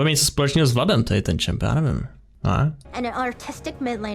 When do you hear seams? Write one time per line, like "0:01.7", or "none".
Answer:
0:02.8